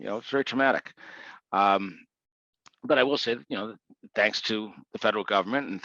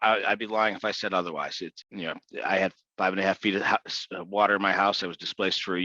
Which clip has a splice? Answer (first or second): second